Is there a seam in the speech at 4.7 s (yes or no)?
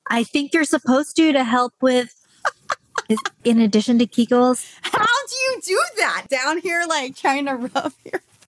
no